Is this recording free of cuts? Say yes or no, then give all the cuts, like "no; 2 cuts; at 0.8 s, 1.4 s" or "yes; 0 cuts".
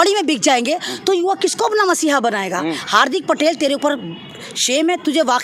yes; 0 cuts